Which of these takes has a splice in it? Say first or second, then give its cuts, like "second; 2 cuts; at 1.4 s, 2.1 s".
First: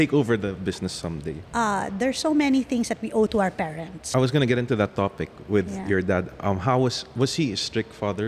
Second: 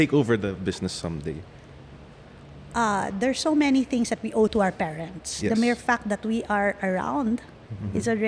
first; 2 cuts; at 1.4 s, 3.9 s